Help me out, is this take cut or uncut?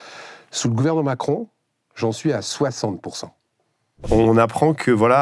cut